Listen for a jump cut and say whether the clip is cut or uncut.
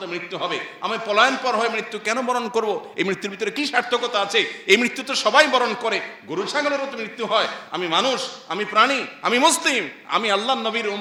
uncut